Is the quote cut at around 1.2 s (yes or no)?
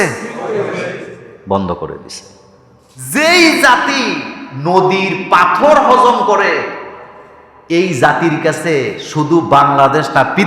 no